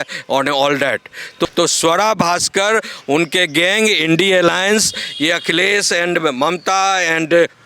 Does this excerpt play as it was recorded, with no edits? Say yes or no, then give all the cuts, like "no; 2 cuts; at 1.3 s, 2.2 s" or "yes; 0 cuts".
no; 1 cut; at 1.5 s